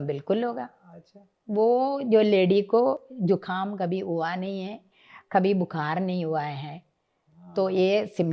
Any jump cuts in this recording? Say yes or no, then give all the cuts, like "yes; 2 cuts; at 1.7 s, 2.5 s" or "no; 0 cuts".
no; 0 cuts